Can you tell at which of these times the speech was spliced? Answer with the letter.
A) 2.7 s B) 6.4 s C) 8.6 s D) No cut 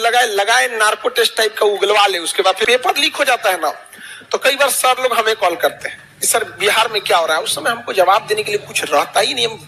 A